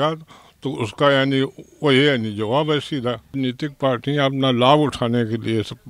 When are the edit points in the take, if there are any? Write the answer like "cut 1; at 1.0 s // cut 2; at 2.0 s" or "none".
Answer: cut 1; at 3.4 s